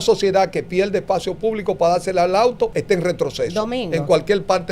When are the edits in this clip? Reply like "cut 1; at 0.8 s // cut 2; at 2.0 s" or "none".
cut 1; at 2.7 s